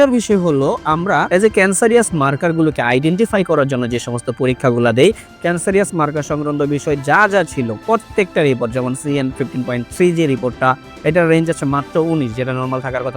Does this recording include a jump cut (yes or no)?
yes